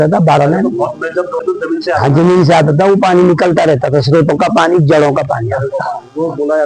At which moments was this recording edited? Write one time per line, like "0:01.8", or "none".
0:01.4